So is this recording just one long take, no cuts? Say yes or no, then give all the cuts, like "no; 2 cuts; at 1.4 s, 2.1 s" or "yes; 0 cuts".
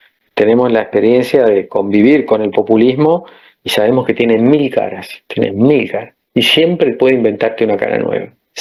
yes; 0 cuts